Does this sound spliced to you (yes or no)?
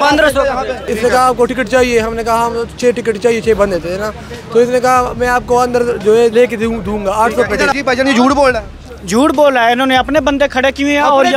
yes